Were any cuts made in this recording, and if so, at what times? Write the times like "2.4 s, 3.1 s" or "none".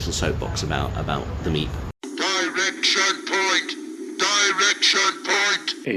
1.9 s